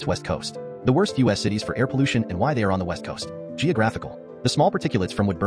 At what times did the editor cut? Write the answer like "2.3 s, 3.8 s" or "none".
none